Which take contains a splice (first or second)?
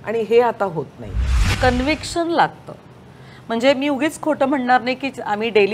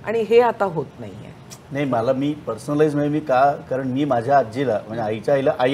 first